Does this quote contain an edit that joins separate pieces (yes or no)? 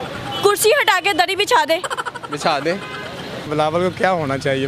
yes